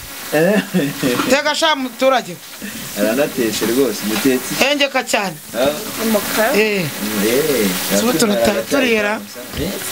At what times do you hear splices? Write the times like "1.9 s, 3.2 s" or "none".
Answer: none